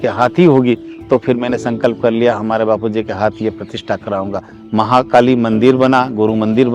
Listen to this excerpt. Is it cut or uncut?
uncut